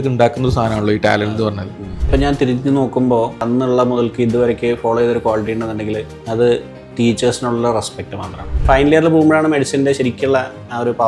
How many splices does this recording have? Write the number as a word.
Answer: four